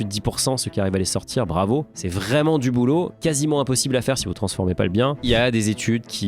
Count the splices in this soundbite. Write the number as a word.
two